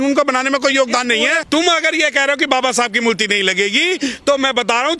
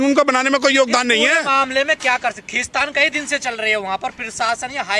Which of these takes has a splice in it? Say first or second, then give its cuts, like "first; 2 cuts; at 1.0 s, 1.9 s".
first; 1 cut; at 1.4 s